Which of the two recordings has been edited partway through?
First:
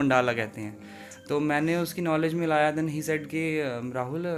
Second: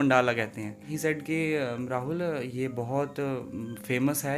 second; 1 cut; at 0.9 s

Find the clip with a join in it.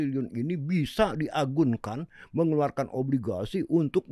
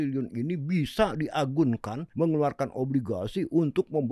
second; 1 cut; at 2.0 s

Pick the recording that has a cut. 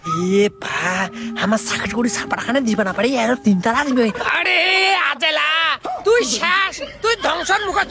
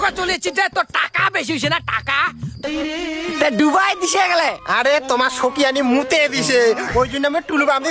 second; 1 cut; at 2.6 s

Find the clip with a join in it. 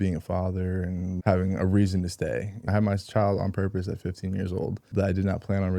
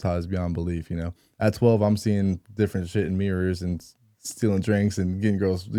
first; 3 cuts; at 1.2 s, 2.7 s, 4.9 s

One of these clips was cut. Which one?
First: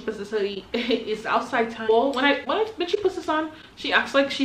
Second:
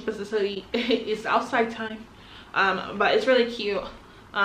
first; 1 cut; at 1.9 s

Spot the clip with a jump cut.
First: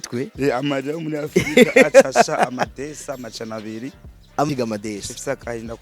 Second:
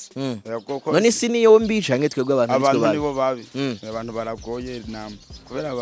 first; 1 cut; at 4.5 s

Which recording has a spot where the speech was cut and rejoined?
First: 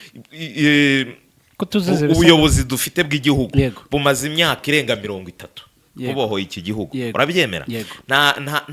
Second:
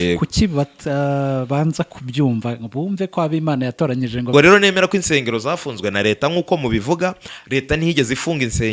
second; 1 cut; at 4.3 s

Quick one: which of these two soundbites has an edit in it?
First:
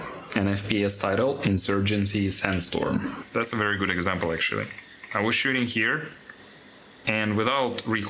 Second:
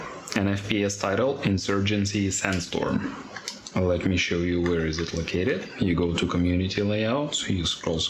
first; 1 cut; at 3.3 s

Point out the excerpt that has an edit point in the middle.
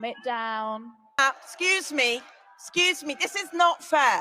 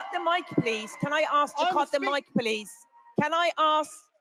first; 1 cut; at 1.2 s

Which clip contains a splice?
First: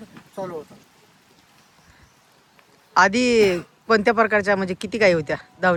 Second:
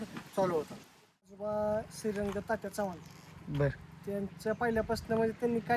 second; 1 cut; at 1.3 s

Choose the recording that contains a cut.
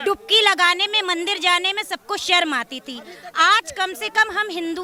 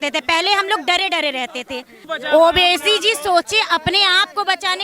second; 1 cut; at 2.0 s

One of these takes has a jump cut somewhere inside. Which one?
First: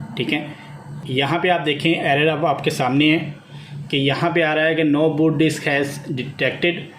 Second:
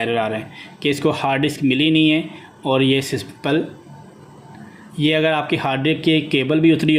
first; 1 cut; at 0.9 s

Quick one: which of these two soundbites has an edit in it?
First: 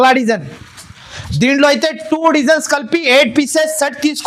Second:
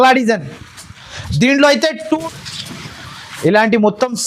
second; 1 cut; at 2.2 s

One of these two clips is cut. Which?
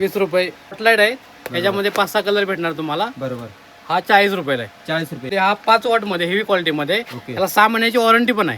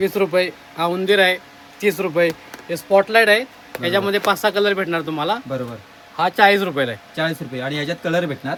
first; 2 cuts; at 0.8 s, 5.3 s

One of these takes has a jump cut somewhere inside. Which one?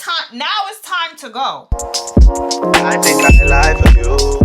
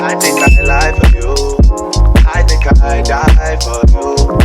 first; 1 cut; at 1.7 s

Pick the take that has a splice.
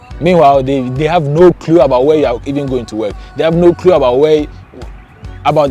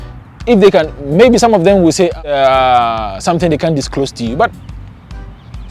second; 1 cut; at 2.3 s

